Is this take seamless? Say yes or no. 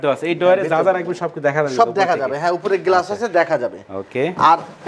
yes